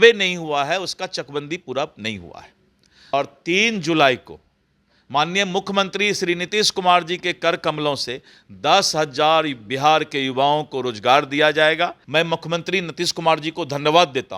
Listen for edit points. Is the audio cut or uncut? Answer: cut